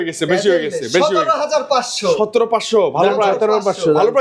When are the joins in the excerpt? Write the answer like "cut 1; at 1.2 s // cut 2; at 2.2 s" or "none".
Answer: none